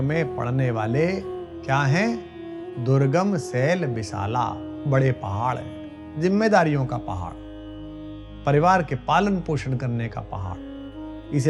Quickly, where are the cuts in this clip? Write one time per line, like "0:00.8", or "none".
none